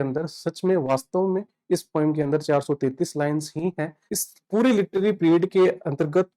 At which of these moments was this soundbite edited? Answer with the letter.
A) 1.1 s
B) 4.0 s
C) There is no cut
B